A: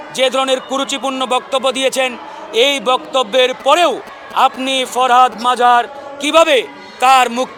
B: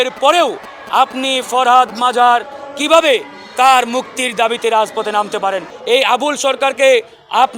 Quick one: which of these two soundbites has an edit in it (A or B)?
B